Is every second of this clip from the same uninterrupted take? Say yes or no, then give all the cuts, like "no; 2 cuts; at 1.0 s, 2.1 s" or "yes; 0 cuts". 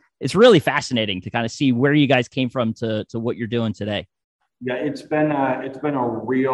yes; 0 cuts